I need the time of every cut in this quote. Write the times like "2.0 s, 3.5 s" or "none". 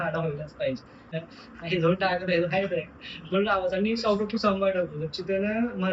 1.1 s